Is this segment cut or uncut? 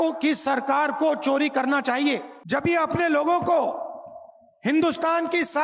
cut